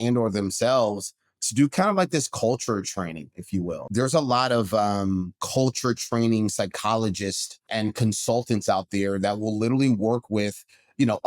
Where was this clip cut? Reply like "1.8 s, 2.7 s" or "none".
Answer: 3.8 s, 5.4 s, 7.6 s